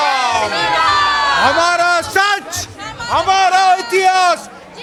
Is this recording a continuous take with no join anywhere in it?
yes; 0 cuts

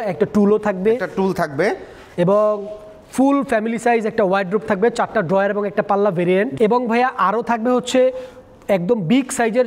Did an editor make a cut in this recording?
no; 0 cuts

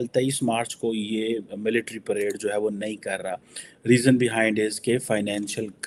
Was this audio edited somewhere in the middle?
no; 0 cuts

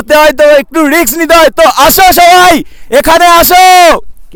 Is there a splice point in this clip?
no; 0 cuts

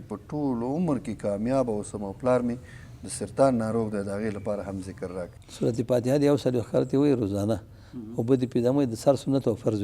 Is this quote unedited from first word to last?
no; 1 cut; at 5.4 s

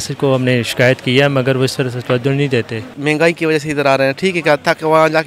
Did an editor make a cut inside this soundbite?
yes; 1 cut; at 2.9 s

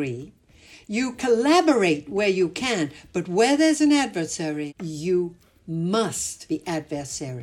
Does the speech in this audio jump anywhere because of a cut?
yes; 2 cuts; at 4.7 s, 6.3 s

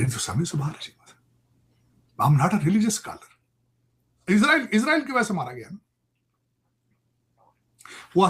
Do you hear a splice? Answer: yes; 1 cut; at 4.2 s

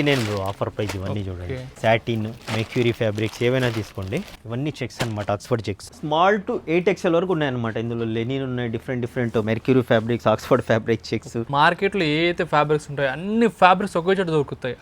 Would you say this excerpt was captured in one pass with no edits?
no; 6 cuts; at 1.7 s, 2.4 s, 4.4 s, 5.9 s, 9.4 s, 11.5 s

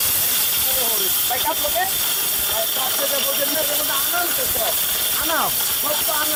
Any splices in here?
no; 0 cuts

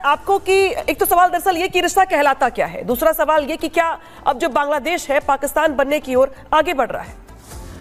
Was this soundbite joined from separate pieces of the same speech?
no; 0 cuts

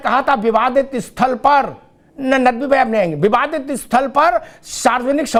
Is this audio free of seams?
yes; 0 cuts

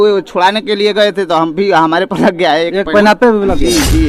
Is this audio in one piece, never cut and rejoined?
yes; 0 cuts

